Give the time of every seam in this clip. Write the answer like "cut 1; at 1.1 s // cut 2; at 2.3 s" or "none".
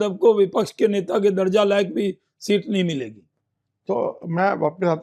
none

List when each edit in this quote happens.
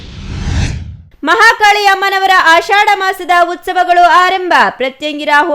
none

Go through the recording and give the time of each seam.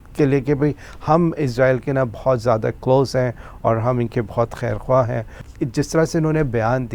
cut 1; at 5.4 s

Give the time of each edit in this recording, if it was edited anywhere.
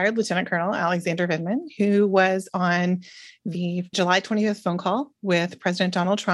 none

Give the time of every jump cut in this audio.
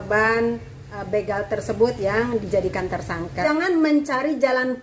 cut 1; at 3.4 s

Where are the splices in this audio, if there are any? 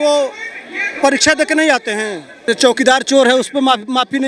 cut 1; at 2.5 s

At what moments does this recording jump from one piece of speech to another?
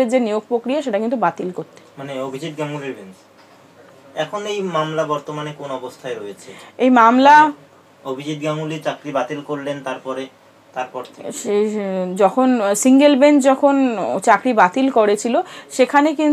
none

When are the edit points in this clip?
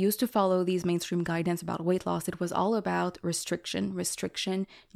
none

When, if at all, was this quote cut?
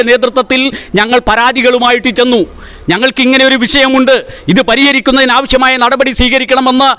none

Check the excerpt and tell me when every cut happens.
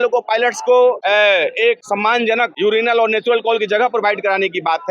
cut 1; at 1.0 s // cut 2; at 2.3 s

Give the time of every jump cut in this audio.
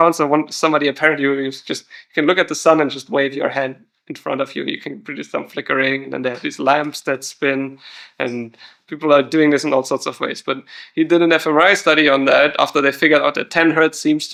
none

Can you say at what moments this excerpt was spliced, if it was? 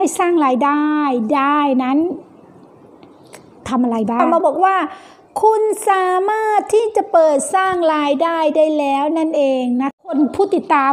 cut 1; at 4.2 s // cut 2; at 10.1 s

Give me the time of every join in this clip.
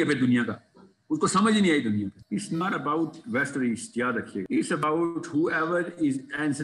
cut 1; at 2.2 s // cut 2; at 4.5 s

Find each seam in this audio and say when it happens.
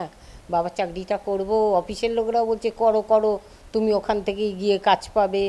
none

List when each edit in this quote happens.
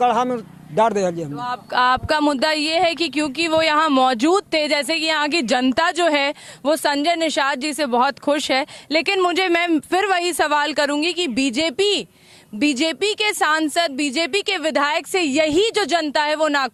none

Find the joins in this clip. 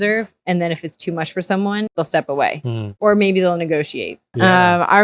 cut 1; at 1.9 s // cut 2; at 2.8 s // cut 3; at 4.2 s

